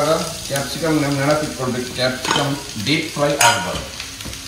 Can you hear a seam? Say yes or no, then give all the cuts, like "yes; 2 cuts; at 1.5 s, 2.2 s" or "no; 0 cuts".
no; 0 cuts